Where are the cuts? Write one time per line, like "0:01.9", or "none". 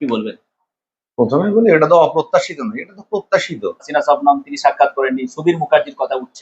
0:03.9